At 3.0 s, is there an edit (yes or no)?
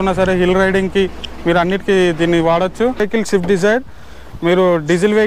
yes